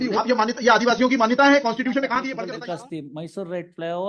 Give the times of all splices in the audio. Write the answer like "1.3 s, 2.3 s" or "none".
2.3 s